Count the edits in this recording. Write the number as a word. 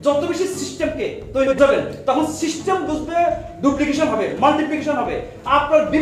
one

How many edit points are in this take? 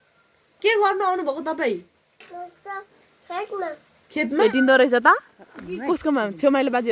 one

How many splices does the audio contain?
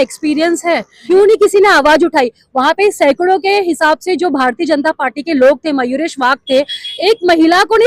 one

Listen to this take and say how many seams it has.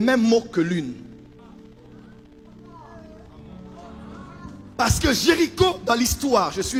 zero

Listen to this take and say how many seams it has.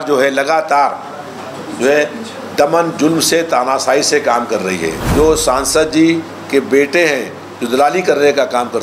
one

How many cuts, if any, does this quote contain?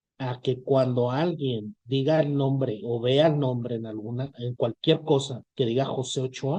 zero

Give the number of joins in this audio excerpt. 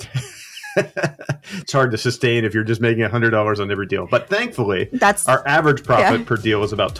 zero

